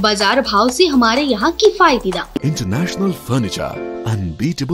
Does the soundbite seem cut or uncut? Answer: cut